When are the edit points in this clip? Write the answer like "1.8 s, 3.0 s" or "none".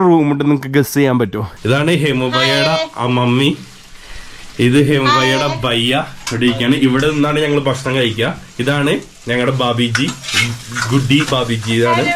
1.5 s